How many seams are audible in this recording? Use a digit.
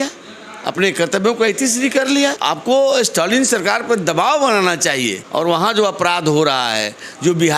2